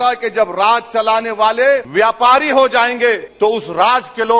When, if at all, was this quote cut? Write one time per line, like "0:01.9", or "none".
0:01.9
0:03.3